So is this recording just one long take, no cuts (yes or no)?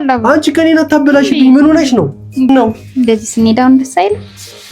no